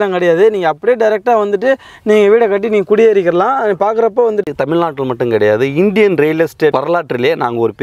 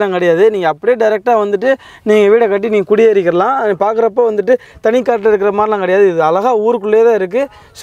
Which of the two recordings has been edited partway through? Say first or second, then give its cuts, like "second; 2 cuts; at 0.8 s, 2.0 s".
first; 2 cuts; at 4.5 s, 6.7 s